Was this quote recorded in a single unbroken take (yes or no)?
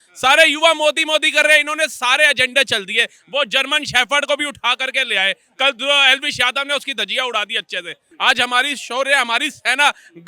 no